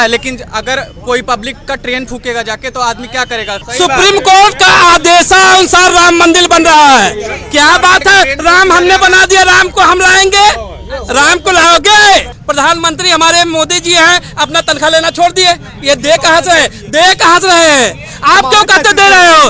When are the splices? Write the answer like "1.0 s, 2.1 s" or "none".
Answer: 3.6 s, 12.4 s